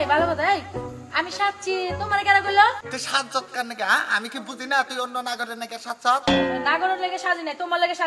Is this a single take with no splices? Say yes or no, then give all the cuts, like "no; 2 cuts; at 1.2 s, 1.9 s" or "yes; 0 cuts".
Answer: no; 1 cut; at 2.9 s